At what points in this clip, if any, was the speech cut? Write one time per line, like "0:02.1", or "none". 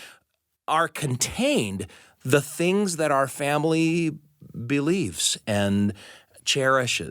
0:05.3